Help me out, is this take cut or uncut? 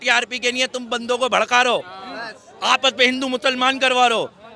uncut